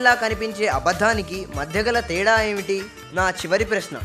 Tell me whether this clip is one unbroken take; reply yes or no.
no